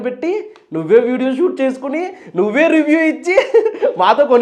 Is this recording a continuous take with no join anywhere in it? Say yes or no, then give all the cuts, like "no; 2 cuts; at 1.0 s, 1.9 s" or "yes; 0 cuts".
yes; 0 cuts